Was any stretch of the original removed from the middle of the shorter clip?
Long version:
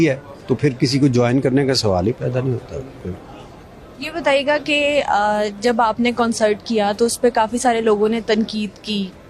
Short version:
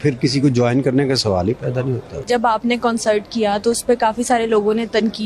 yes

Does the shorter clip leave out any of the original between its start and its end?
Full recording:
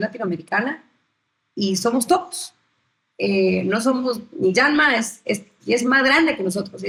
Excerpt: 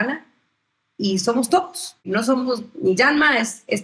yes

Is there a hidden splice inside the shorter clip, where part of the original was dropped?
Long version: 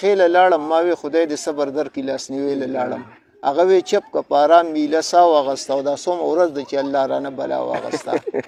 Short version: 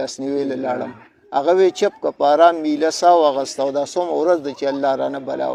no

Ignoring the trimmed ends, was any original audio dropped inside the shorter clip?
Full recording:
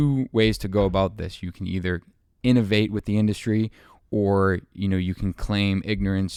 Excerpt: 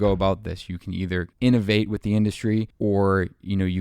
yes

